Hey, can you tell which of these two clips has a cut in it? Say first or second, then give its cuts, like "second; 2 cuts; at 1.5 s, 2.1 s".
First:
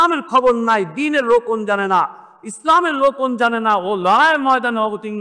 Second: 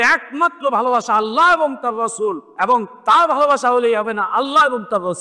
second; 1 cut; at 2.5 s